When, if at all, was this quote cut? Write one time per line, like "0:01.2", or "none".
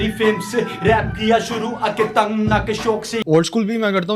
0:03.2